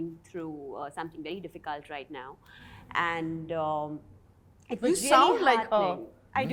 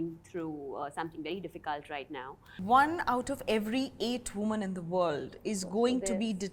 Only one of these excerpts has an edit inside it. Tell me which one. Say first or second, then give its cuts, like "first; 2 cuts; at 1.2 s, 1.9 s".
second; 1 cut; at 2.4 s